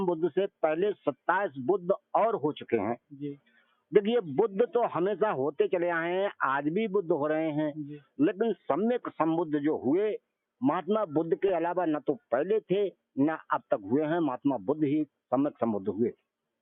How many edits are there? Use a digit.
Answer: 0